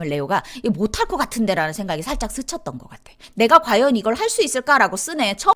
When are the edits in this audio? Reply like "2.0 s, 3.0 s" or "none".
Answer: 3.2 s